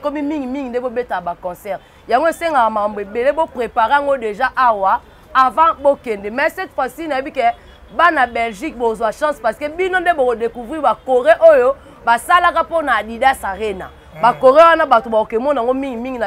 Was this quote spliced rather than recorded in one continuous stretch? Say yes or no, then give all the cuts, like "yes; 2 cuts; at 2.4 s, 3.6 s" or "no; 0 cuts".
no; 0 cuts